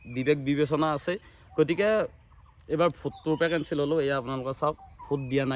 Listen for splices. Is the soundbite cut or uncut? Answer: uncut